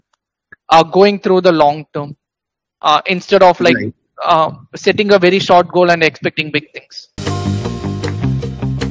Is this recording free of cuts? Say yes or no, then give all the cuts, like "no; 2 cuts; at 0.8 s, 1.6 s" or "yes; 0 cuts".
no; 1 cut; at 7.3 s